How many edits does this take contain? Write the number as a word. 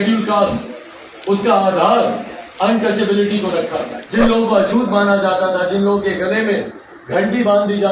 one